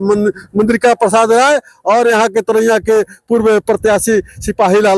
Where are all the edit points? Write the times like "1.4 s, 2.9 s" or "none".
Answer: none